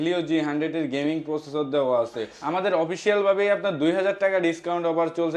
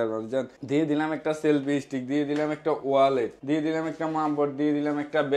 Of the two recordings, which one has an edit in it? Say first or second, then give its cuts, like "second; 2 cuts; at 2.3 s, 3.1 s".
first; 1 cut; at 2.3 s